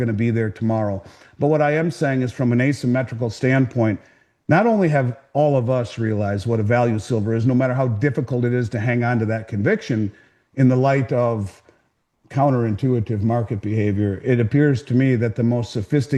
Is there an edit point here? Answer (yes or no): no